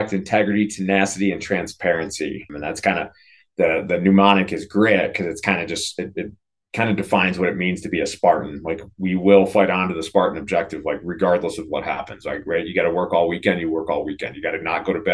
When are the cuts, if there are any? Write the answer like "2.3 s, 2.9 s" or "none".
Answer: 2.5 s